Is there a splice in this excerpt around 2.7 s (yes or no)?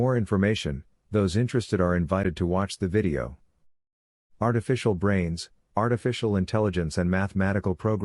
no